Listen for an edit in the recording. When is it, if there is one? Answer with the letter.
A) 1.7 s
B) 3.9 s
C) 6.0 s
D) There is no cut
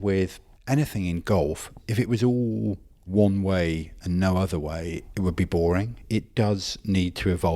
C